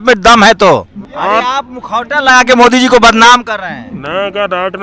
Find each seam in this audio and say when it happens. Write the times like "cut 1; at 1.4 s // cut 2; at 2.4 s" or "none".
cut 1; at 1.0 s